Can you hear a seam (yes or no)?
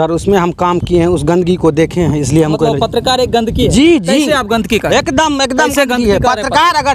no